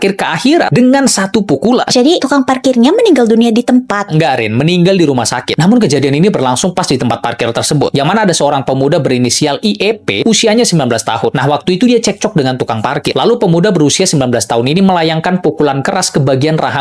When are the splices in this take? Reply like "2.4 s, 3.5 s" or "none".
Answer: none